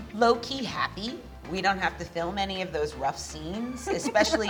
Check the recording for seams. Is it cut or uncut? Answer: uncut